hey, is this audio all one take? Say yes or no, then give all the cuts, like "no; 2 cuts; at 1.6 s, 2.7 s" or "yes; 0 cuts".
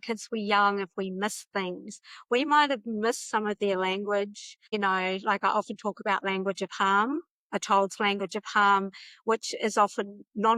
yes; 0 cuts